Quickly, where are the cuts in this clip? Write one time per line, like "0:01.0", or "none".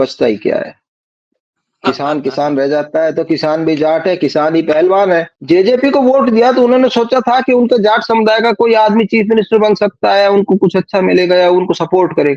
0:05.3